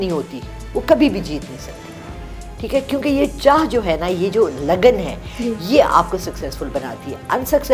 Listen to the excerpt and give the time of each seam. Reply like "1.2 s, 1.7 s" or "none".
none